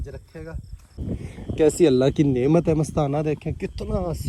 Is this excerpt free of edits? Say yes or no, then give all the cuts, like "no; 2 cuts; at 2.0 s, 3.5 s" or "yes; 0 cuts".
no; 1 cut; at 1.0 s